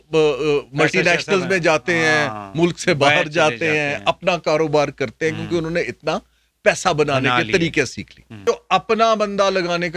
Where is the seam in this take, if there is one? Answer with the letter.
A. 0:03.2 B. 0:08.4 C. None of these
B